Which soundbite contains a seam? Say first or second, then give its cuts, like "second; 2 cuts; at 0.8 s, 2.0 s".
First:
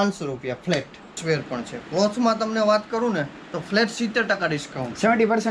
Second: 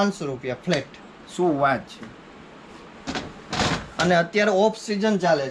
first; 1 cut; at 1.2 s